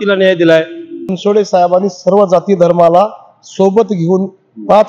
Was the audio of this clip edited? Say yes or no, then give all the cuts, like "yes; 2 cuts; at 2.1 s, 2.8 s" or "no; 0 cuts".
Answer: yes; 1 cut; at 1.1 s